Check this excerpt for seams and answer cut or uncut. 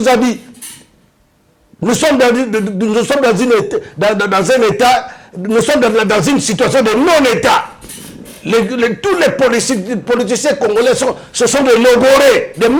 uncut